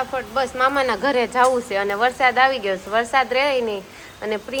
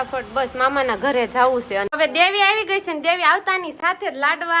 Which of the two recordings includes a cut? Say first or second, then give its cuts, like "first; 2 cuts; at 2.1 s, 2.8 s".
second; 1 cut; at 1.9 s